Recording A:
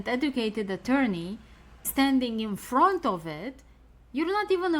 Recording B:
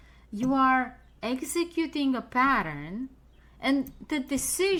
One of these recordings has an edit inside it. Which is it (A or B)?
A